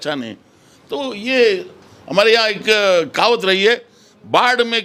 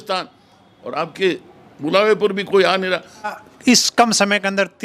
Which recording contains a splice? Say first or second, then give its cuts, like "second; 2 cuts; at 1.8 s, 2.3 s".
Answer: second; 1 cut; at 3.3 s